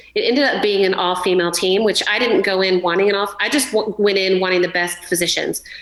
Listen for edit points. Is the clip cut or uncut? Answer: uncut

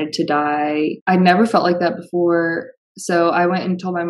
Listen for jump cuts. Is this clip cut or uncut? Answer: cut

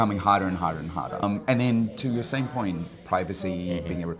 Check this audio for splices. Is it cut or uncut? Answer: cut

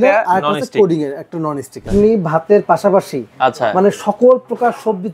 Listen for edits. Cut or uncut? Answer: cut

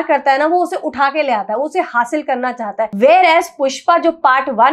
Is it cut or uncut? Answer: cut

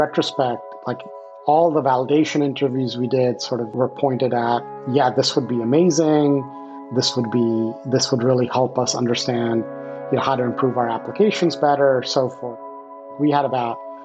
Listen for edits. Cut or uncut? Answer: cut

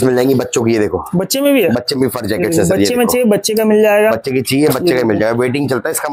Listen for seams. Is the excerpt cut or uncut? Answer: uncut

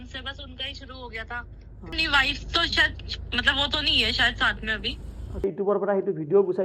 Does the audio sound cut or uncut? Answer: cut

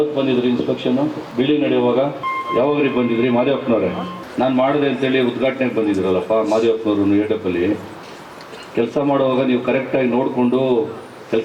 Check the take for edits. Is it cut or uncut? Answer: cut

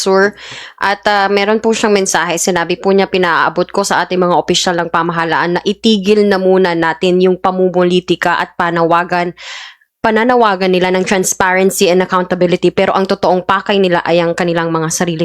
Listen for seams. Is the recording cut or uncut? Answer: uncut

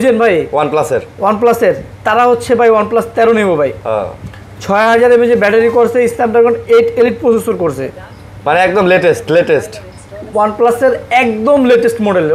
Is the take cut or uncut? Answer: uncut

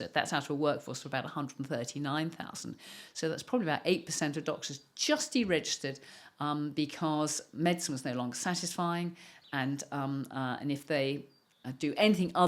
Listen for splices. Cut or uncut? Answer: uncut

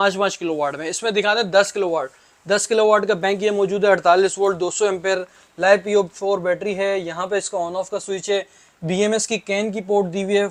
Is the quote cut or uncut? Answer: uncut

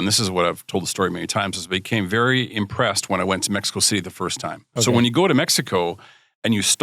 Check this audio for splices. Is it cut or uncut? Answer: cut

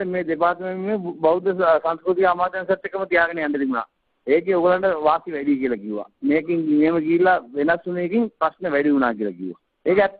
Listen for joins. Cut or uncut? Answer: uncut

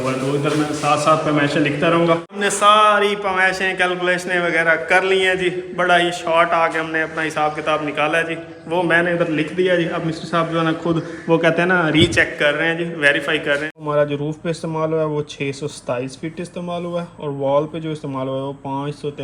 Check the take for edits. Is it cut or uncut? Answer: cut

